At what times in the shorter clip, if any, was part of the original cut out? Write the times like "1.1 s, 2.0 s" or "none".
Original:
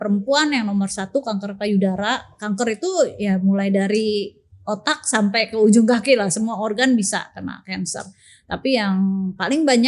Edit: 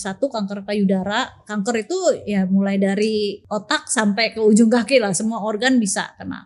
3.5 s